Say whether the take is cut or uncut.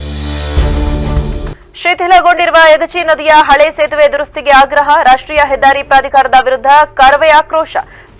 uncut